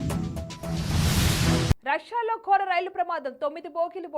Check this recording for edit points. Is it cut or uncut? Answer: cut